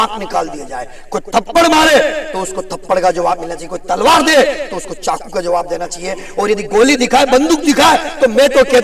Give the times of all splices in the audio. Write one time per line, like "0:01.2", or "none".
none

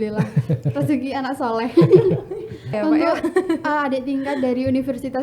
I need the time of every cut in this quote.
0:02.7

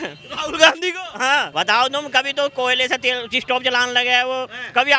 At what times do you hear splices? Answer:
0:01.5

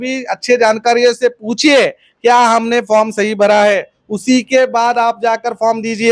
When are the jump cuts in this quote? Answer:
none

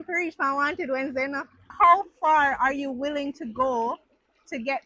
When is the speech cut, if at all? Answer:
0:01.7

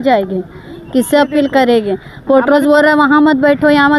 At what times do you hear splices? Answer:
none

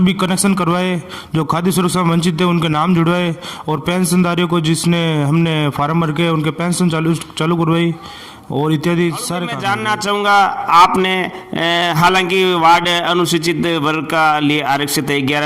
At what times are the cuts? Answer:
0:09.6

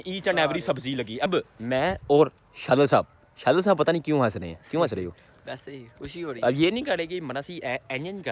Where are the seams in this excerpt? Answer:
0:01.3

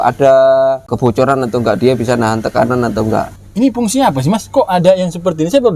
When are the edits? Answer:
0:00.9
0:03.4

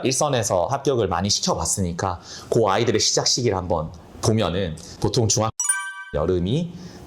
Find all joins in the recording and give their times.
0:04.8

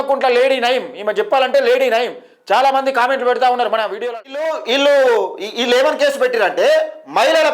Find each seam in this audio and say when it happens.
0:04.0

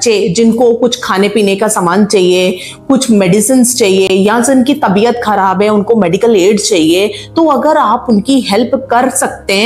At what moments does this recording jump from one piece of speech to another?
none

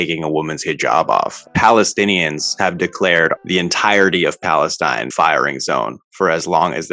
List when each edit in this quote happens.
0:01.4
0:03.4
0:05.1

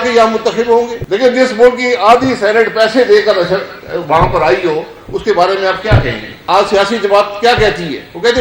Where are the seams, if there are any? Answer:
0:01.0
0:06.3

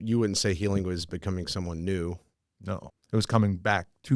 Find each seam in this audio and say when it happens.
0:02.7

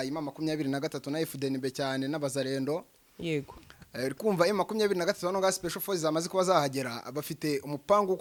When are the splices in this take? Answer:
none

